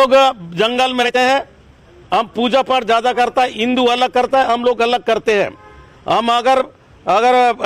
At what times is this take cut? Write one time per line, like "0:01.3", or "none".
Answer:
0:01.0